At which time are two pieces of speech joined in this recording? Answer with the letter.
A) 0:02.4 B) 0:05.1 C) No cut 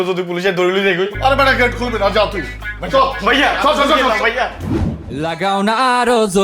B